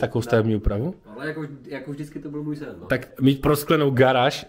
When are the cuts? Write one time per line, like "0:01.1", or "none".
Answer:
0:03.1